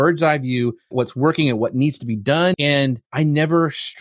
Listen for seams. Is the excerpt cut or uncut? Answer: cut